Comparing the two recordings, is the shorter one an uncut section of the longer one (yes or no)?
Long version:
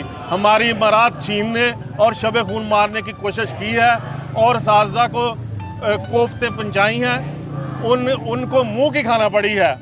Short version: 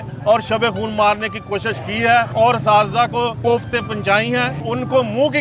no